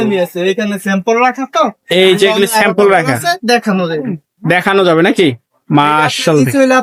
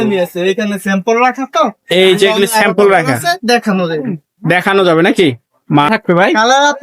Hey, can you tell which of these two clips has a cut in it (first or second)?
second